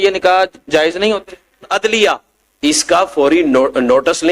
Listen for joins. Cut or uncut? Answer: cut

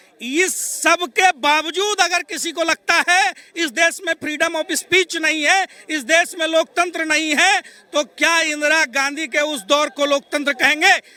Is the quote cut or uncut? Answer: uncut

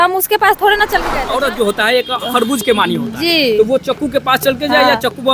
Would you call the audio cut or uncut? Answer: cut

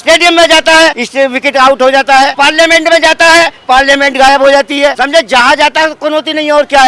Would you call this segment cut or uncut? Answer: cut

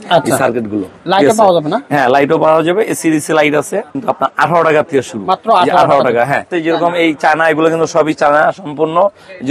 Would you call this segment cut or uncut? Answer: cut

